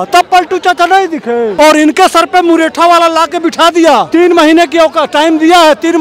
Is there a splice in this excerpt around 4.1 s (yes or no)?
yes